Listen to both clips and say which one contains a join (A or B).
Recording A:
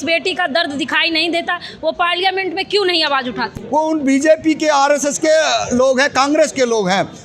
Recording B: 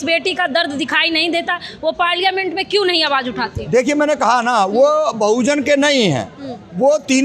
A